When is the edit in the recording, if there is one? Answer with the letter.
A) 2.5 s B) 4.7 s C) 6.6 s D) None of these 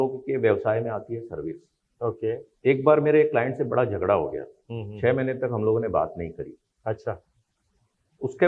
A